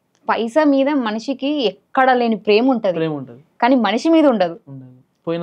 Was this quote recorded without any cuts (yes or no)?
yes